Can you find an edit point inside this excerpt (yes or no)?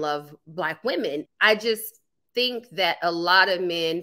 yes